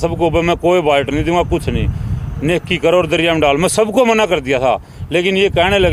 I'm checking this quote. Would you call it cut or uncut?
uncut